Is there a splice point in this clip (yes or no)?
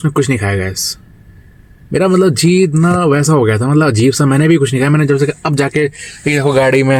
no